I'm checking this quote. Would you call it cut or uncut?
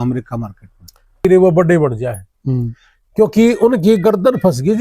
cut